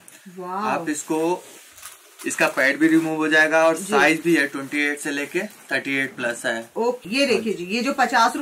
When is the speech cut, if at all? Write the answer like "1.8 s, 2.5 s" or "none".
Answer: 7.0 s